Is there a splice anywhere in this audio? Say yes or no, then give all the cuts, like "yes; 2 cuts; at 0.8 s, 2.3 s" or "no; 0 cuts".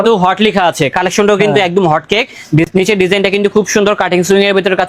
no; 0 cuts